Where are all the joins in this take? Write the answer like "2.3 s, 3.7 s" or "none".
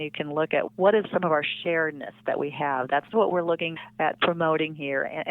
1.0 s